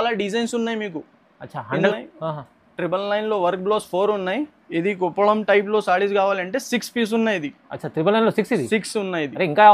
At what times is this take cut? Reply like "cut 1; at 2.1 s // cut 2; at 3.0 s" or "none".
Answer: cut 1; at 1.9 s